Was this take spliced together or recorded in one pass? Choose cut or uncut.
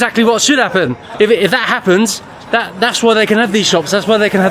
cut